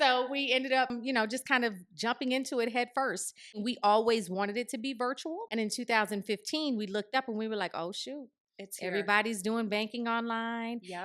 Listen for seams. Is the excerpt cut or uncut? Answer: cut